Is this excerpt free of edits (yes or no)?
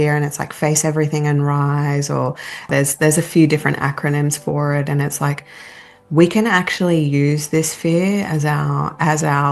no